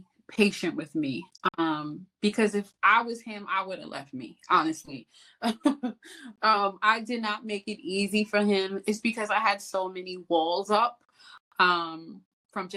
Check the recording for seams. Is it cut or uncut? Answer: uncut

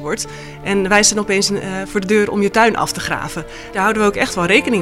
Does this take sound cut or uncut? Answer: cut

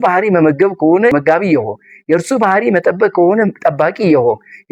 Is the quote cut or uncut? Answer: cut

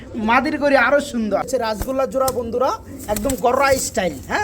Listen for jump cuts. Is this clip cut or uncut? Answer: cut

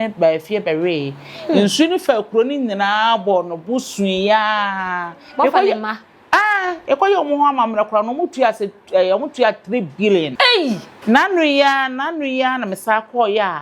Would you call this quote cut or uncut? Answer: cut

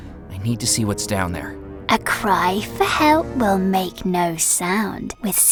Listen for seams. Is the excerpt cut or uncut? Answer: uncut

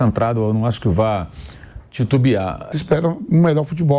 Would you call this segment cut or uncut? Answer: cut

